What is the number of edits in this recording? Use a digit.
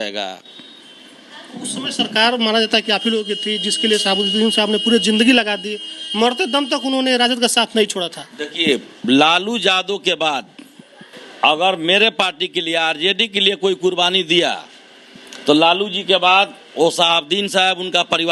0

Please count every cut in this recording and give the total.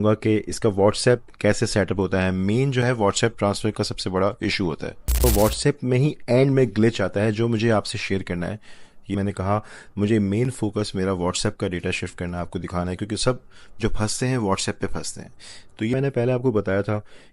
3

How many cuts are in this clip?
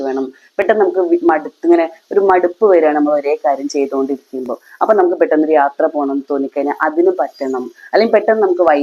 0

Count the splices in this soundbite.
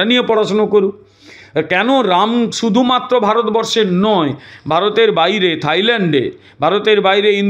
0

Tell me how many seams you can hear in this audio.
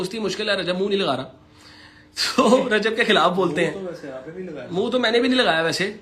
0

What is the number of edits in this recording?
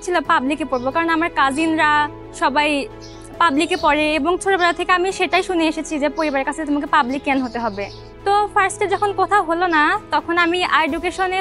0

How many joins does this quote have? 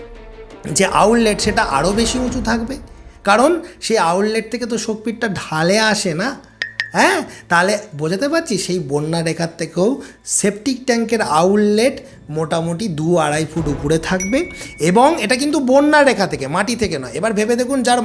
0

